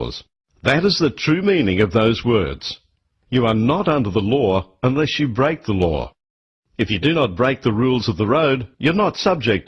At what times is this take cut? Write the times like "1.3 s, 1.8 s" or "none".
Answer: none